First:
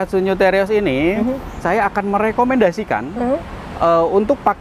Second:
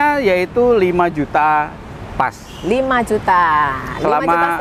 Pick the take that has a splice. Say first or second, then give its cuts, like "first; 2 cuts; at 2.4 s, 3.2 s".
first; 1 cut; at 1.6 s